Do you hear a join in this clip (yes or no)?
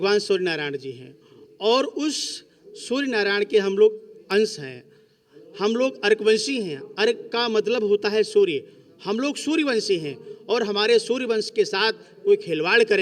no